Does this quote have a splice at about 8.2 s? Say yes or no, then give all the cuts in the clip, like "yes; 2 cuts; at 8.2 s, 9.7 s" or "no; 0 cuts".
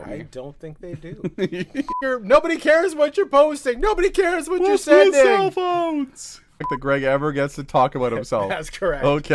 no; 2 cuts; at 2.0 s, 6.7 s